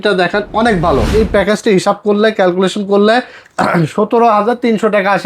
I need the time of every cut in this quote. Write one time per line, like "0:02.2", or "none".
0:01.1